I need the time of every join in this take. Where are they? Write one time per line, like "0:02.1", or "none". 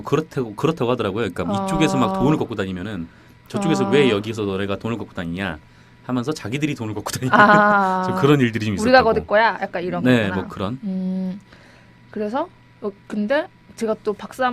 0:09.1